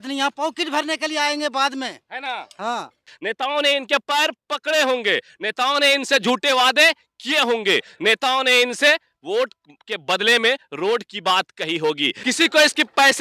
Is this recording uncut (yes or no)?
no